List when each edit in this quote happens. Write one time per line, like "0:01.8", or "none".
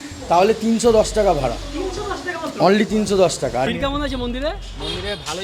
0:03.7